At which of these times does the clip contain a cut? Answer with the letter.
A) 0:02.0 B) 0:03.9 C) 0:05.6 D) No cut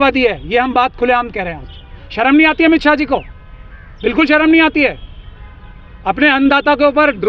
A